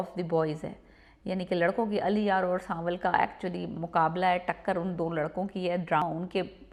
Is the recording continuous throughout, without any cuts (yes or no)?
yes